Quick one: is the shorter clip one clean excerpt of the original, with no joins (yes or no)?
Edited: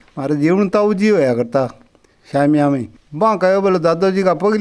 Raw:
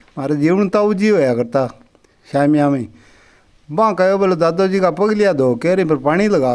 no